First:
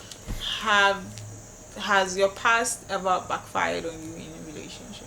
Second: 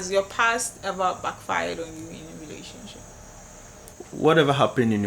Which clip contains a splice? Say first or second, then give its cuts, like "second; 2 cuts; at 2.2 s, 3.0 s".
second; 1 cut; at 4.0 s